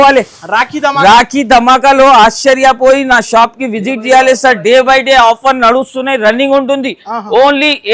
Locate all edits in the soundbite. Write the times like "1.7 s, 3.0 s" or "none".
none